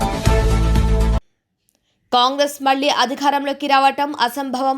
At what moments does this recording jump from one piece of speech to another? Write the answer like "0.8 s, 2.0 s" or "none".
1.2 s